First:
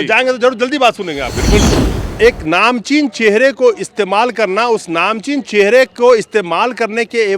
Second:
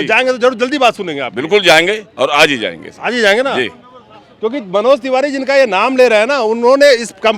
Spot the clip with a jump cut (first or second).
first